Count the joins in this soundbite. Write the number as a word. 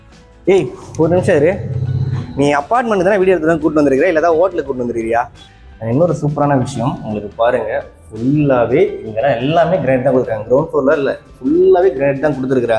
one